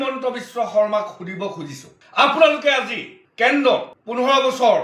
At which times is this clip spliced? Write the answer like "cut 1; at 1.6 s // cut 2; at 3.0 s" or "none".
none